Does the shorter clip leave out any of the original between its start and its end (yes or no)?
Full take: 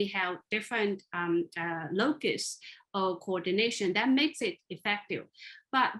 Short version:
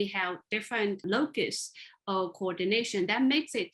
yes